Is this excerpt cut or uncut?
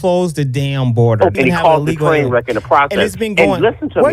cut